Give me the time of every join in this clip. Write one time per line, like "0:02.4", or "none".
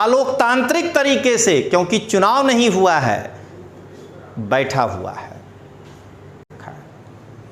0:06.5